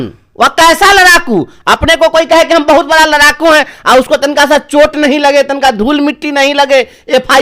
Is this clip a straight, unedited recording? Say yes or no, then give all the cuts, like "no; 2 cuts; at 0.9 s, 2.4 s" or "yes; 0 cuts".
yes; 0 cuts